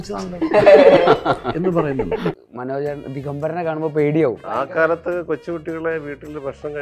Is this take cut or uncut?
cut